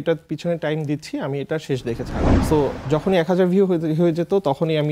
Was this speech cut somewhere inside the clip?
yes; 1 cut; at 2.4 s

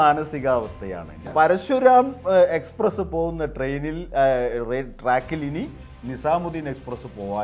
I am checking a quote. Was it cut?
yes; 1 cut; at 1.3 s

